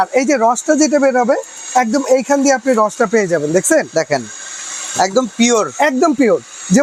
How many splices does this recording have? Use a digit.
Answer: 0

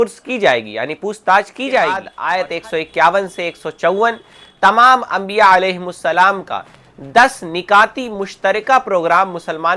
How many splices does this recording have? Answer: 1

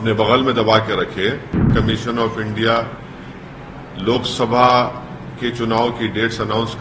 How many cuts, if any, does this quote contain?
1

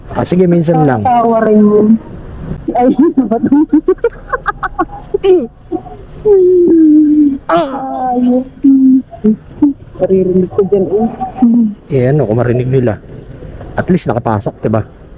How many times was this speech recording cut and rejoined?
1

